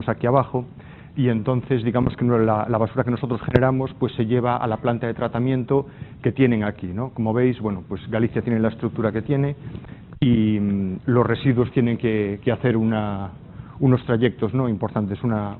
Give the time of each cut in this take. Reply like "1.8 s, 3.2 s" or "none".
none